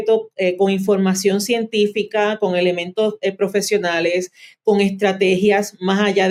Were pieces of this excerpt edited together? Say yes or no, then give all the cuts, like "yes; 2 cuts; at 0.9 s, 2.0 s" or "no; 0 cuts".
no; 0 cuts